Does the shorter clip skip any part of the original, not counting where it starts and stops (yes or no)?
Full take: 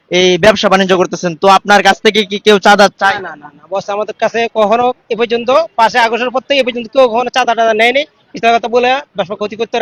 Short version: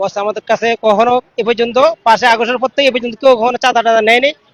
no